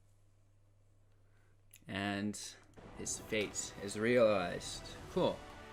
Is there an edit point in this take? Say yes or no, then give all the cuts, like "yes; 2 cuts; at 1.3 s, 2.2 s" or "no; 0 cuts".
no; 0 cuts